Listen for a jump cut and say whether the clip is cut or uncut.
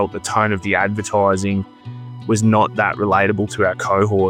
uncut